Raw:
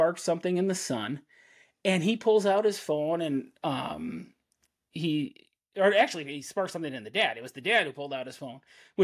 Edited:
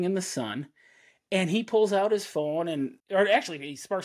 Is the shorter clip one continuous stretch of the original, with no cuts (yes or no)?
no